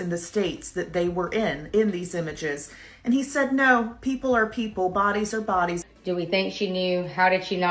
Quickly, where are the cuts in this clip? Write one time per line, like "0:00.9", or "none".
0:05.8